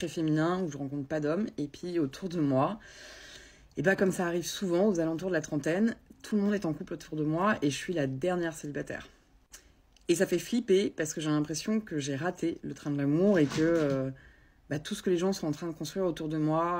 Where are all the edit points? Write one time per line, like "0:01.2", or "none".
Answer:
0:07.5